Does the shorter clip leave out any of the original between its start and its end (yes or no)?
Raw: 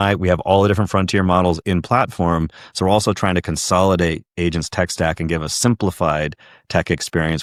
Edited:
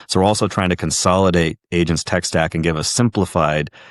no